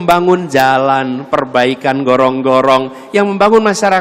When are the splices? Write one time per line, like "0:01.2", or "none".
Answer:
none